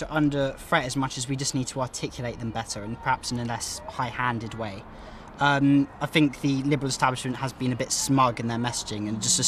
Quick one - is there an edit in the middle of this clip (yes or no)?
no